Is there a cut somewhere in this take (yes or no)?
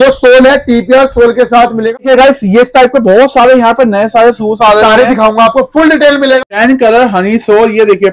yes